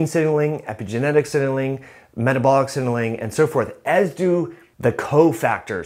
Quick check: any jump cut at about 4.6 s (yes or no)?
yes